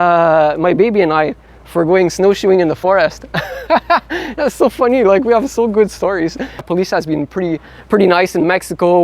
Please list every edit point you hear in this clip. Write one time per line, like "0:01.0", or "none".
0:06.7